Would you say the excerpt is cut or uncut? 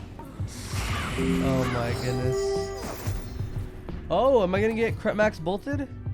cut